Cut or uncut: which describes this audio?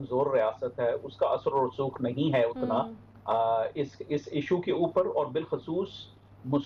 uncut